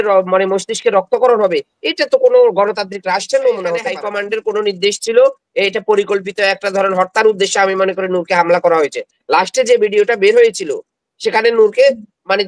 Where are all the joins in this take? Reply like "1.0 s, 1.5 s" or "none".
4.0 s

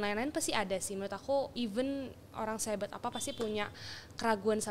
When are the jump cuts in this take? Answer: 1.5 s

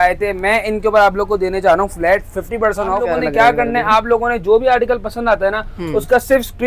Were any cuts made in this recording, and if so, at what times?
3.0 s

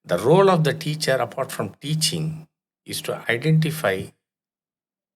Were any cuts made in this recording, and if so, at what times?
none

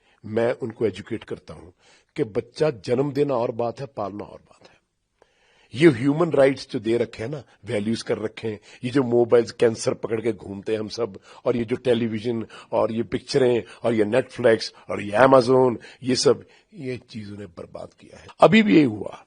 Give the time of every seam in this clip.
18.2 s

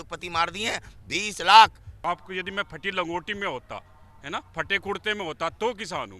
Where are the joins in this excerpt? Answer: 1.9 s

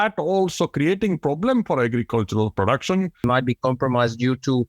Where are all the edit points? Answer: 3.2 s

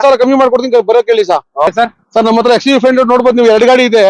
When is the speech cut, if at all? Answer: 1.7 s

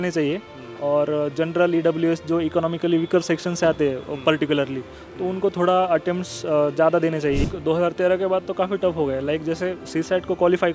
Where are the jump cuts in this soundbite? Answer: 7.4 s

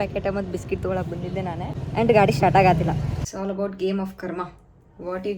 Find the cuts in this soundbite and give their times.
1.8 s, 3.3 s

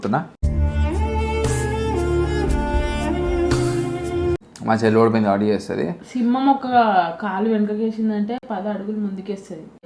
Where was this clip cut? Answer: 4.4 s

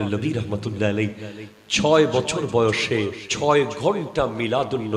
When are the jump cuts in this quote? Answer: 3.2 s

